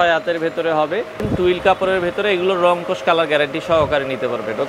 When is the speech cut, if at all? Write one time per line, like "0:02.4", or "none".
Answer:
0:01.2